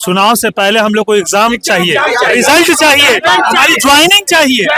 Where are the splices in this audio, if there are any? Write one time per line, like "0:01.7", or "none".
none